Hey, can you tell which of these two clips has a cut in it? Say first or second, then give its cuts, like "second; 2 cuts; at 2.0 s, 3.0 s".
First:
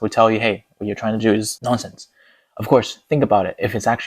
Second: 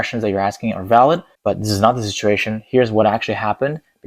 second; 1 cut; at 1.3 s